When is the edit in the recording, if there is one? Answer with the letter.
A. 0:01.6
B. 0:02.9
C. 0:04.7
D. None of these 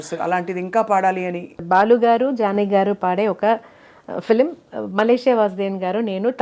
A